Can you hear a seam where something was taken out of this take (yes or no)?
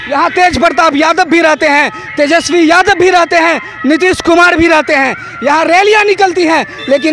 no